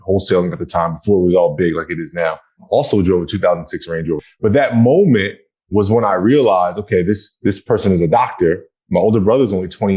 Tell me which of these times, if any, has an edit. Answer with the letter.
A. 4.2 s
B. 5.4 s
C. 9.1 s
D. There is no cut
A